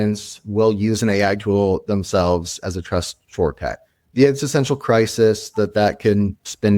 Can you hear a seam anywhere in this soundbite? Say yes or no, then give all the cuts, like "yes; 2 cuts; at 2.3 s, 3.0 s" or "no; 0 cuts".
no; 0 cuts